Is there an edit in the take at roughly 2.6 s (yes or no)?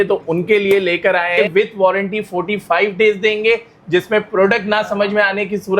no